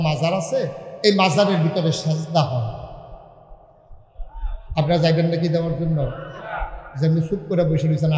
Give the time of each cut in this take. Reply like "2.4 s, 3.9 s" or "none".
none